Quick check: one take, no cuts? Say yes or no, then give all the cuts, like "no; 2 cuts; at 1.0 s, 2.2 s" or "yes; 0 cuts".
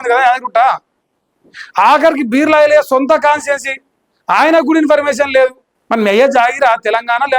no; 1 cut; at 5.7 s